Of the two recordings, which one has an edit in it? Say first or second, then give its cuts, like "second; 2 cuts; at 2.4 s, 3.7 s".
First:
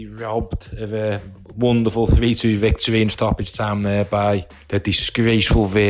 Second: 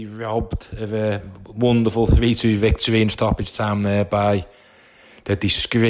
first; 1 cut; at 4.6 s